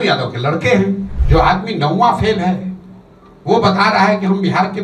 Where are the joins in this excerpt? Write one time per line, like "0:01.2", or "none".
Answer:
0:01.1